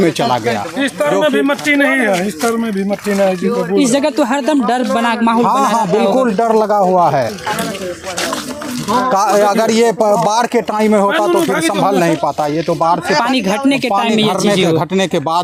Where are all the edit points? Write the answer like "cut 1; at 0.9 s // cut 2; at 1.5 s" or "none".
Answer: none